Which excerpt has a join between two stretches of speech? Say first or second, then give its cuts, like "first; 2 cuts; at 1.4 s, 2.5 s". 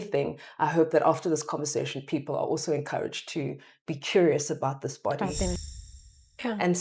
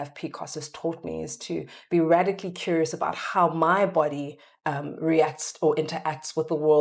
first; 1 cut; at 5.8 s